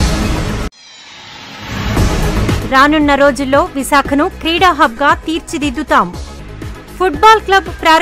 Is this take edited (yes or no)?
yes